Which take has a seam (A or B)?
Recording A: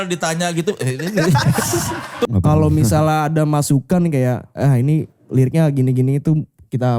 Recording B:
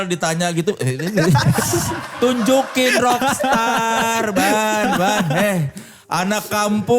A